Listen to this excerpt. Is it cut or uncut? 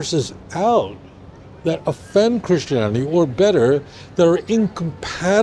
uncut